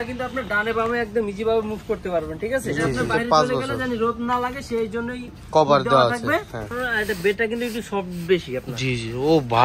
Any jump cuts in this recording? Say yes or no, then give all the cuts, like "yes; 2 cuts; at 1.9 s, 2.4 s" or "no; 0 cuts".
yes; 2 cuts; at 2.7 s, 6.7 s